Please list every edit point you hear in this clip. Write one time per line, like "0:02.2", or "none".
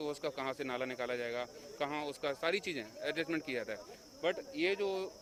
none